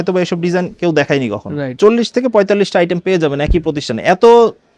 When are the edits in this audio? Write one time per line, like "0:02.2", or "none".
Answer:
0:01.8

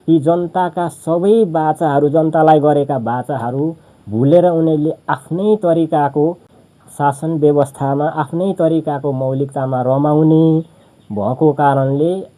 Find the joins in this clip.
none

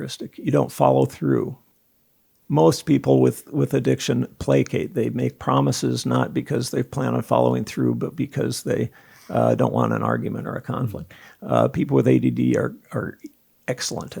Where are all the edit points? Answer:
0:02.1

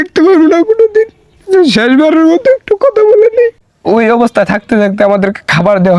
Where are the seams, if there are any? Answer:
0:03.7

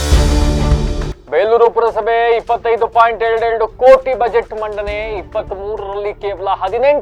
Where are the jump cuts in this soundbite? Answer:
none

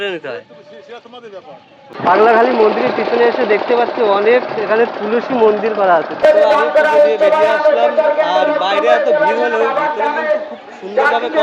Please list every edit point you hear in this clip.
0:01.9
0:06.2

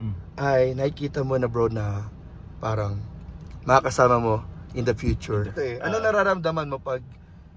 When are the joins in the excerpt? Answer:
0:05.5

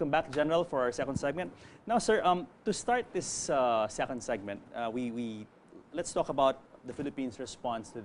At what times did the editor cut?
0:01.2

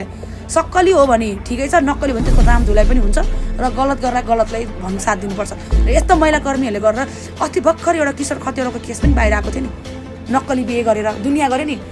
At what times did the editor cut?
none

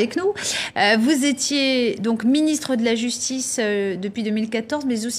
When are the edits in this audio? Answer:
none

